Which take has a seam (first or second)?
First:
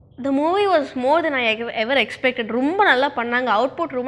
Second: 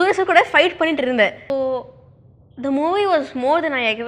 second